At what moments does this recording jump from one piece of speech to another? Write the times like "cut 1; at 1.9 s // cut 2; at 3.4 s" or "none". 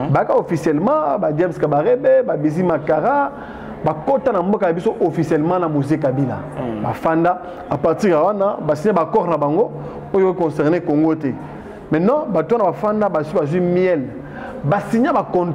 none